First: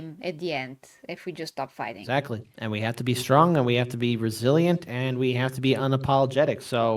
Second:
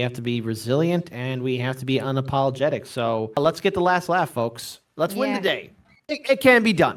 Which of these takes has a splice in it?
first; 1 cut; at 2.0 s

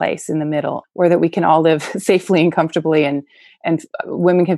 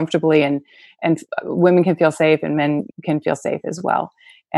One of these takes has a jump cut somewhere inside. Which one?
second; 1 cut; at 2.9 s

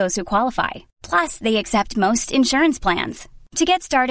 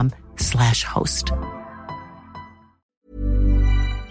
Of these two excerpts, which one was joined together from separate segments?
second; 1 cut; at 2.8 s

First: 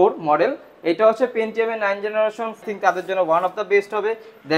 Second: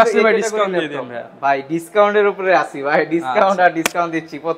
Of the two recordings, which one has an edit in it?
first; 1 cut; at 2.6 s

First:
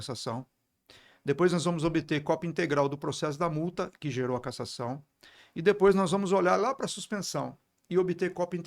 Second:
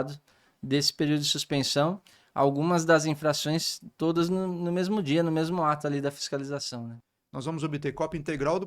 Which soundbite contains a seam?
second; 1 cut; at 7.0 s

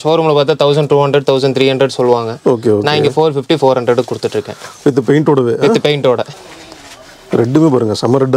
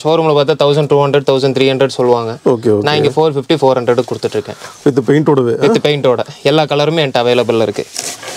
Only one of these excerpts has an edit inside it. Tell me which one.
first; 1 cut; at 6.3 s

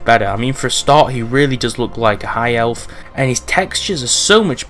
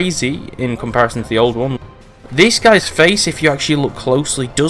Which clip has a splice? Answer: second; 1 cut; at 2.2 s

